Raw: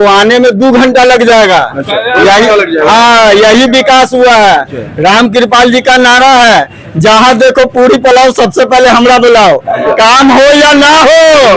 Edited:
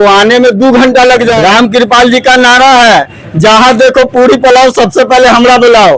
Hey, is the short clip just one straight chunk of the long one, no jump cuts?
no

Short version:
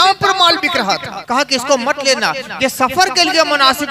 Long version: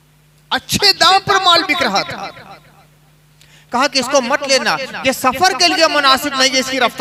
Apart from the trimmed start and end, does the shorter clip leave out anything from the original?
yes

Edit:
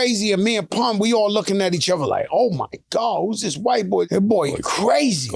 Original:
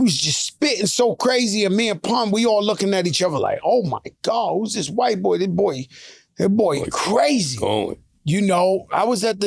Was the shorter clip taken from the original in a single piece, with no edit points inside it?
no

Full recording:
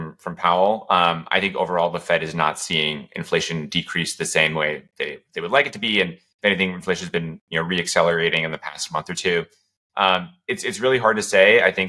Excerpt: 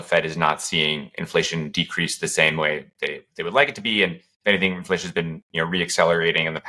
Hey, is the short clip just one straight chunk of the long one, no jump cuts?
yes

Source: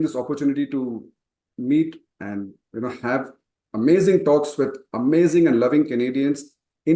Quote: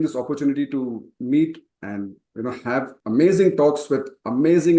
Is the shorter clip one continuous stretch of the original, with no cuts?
no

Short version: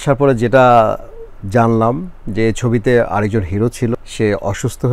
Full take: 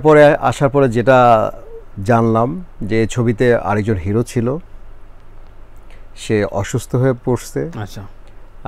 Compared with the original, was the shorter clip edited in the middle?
yes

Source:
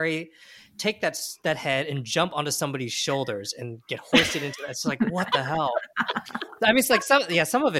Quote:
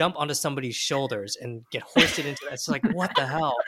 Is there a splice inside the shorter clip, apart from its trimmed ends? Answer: no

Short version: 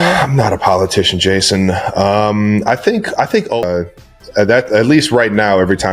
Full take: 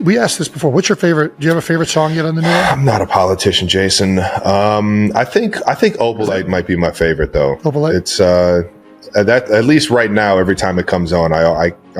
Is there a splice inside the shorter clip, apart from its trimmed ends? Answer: yes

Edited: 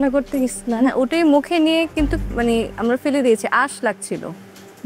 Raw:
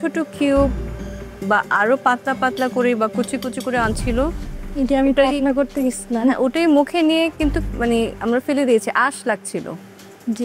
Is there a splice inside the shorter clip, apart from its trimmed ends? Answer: no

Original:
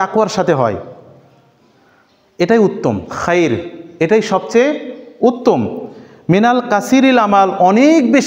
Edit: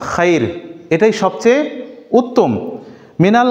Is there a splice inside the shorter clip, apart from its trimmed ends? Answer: no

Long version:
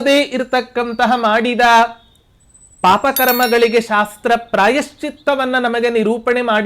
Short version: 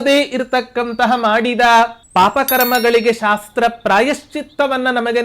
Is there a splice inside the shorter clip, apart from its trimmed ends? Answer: yes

